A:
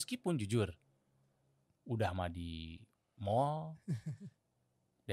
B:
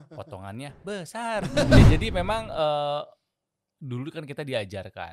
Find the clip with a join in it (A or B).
B